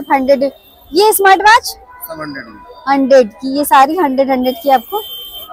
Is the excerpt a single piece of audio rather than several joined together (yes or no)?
yes